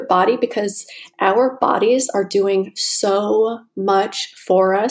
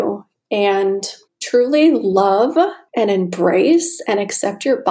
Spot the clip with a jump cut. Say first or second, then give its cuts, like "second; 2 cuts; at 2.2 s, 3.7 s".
second; 2 cuts; at 1.4 s, 2.8 s